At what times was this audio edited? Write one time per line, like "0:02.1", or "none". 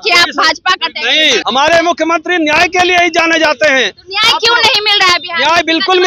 0:01.4